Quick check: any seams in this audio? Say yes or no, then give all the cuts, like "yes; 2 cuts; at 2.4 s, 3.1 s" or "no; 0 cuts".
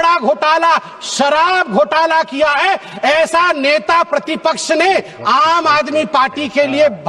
no; 0 cuts